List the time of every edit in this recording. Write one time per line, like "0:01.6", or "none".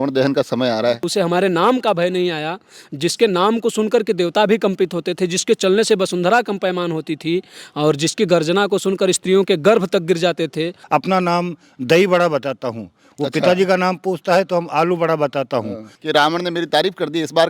0:01.1
0:10.8
0:15.9